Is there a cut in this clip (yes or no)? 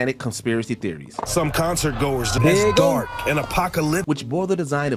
yes